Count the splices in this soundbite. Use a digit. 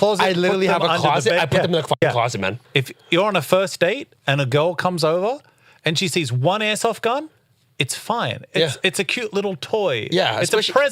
0